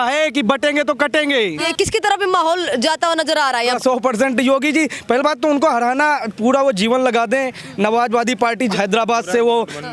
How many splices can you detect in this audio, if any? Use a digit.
3